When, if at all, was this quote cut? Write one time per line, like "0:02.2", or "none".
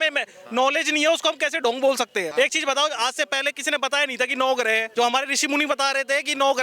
0:02.3
0:04.9